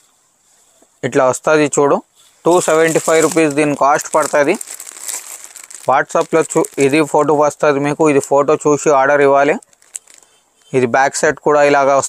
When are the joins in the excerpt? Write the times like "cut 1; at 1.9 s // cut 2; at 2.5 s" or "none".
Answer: none